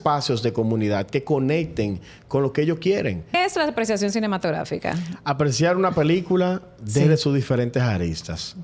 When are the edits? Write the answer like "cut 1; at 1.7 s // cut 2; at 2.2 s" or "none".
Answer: cut 1; at 3.3 s